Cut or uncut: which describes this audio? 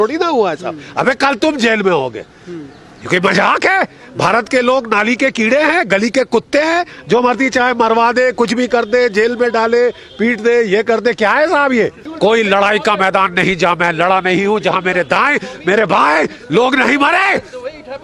cut